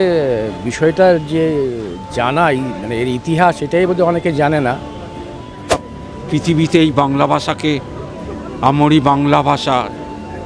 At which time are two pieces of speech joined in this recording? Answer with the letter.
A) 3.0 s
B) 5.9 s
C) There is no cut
B